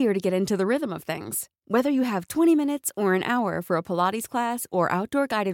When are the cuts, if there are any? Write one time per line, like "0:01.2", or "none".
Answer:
none